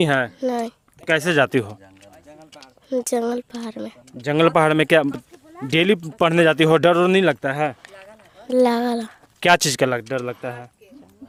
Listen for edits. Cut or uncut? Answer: uncut